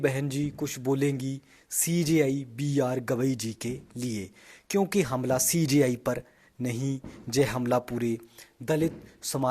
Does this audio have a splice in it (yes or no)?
no